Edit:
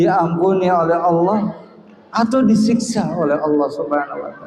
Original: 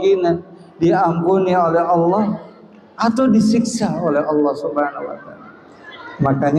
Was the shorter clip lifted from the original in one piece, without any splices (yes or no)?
yes